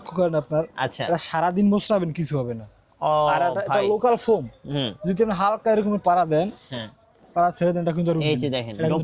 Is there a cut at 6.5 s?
no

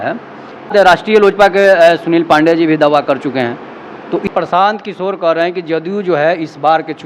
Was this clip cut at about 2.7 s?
no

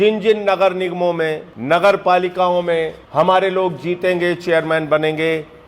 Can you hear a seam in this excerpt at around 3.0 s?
yes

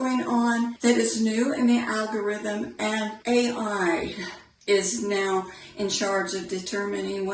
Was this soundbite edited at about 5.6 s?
no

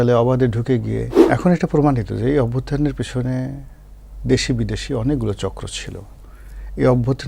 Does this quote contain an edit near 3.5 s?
no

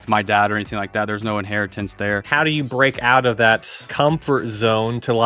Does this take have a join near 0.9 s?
no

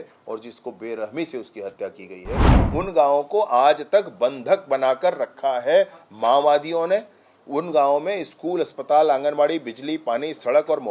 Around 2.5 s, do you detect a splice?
yes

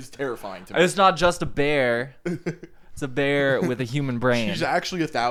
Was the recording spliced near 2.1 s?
no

